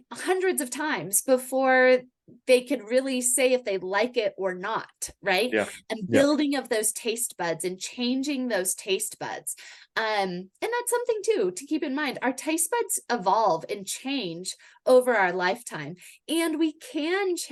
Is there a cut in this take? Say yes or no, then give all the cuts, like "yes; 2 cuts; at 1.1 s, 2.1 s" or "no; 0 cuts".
no; 0 cuts